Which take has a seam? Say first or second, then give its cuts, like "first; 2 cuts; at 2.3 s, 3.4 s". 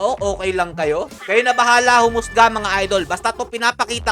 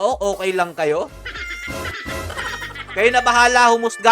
first; 1 cut; at 1.2 s